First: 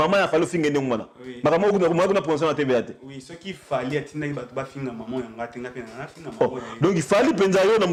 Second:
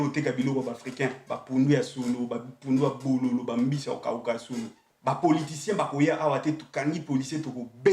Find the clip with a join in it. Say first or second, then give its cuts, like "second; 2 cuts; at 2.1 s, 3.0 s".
second; 1 cut; at 4.9 s